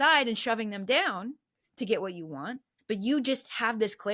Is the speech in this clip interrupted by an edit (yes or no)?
yes